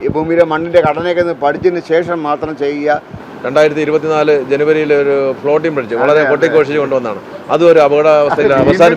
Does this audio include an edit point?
yes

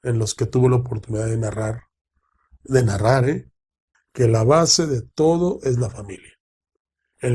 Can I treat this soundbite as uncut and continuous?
no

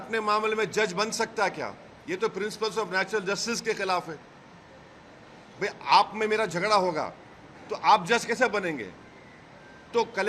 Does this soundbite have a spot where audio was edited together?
no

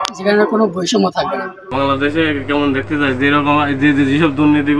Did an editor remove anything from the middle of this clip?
yes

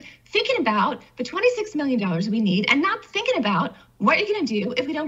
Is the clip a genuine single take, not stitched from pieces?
yes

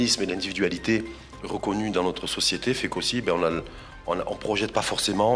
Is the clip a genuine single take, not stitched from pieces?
yes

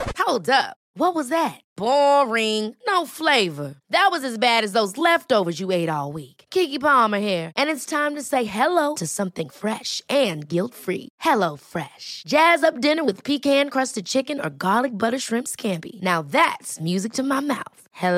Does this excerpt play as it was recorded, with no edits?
yes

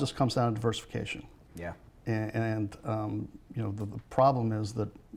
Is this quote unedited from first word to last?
yes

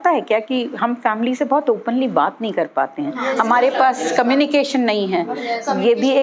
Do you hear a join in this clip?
no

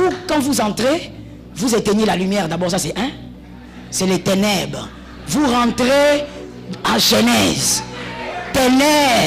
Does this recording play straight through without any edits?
yes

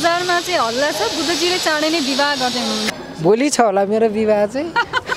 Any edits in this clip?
yes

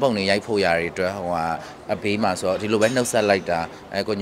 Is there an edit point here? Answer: no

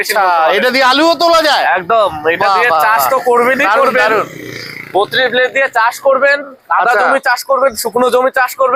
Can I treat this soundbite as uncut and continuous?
yes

